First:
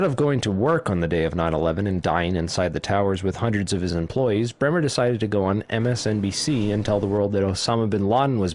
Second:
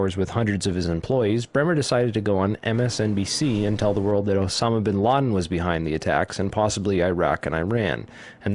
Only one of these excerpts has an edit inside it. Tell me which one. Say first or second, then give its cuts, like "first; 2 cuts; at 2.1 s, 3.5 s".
first; 1 cut; at 1.8 s